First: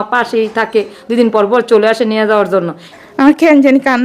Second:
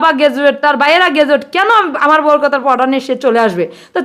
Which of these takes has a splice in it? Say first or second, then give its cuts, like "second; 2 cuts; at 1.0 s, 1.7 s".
first; 1 cut; at 2.8 s